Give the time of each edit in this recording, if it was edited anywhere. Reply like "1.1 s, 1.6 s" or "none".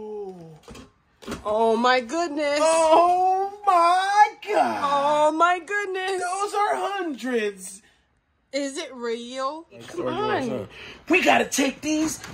9.9 s